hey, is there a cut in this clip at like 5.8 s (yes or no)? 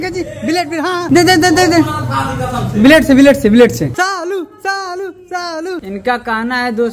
yes